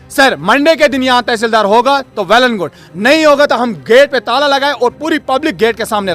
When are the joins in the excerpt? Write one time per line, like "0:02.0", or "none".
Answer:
none